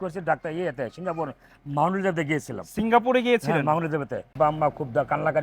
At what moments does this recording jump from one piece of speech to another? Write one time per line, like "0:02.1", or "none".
0:04.3

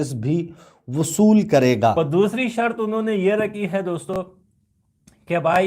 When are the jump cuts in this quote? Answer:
0:01.9

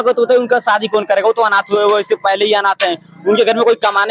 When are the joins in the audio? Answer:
none

